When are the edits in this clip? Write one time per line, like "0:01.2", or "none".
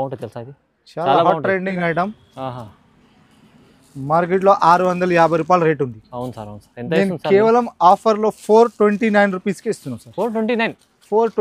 0:01.7